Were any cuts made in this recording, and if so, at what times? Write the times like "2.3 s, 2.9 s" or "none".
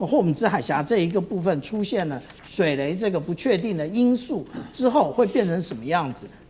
none